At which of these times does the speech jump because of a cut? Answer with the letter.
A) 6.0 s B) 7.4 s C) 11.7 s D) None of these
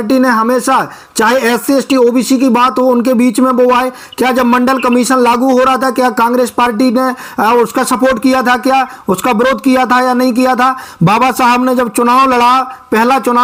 D